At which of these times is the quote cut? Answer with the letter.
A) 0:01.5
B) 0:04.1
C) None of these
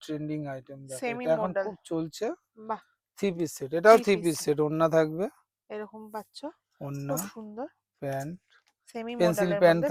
C